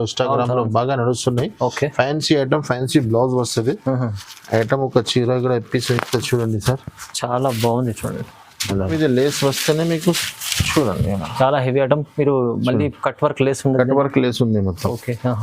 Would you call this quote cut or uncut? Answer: cut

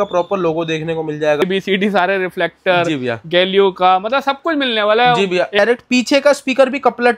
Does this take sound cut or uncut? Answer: cut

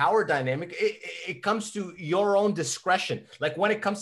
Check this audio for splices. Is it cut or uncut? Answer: uncut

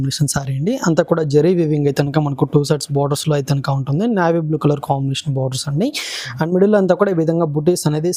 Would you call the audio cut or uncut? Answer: uncut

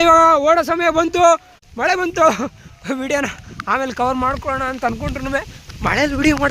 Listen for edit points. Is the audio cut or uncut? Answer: uncut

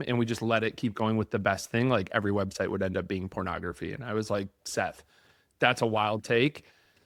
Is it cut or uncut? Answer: uncut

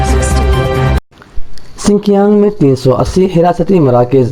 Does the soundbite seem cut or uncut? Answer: cut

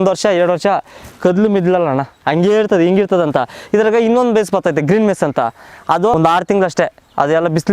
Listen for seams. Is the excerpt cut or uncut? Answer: cut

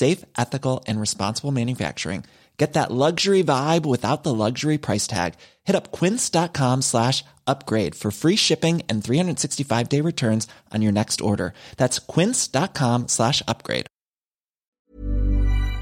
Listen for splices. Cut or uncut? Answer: cut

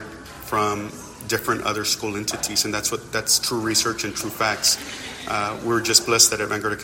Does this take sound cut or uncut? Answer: uncut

